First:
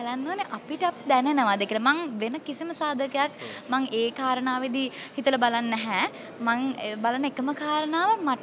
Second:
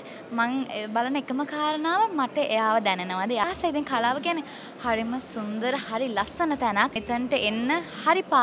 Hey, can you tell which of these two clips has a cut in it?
second; 2 cuts; at 3.4 s, 7.0 s

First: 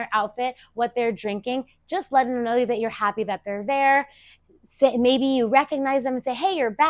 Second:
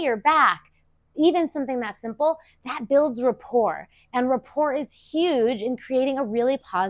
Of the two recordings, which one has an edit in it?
first; 1 cut; at 4.4 s

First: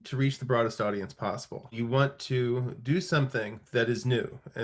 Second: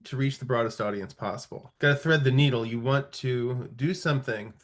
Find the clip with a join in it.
first; 1 cut; at 1.7 s

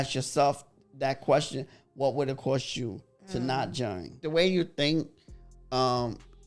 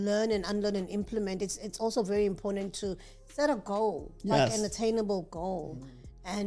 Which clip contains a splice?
first; 1 cut; at 4.2 s

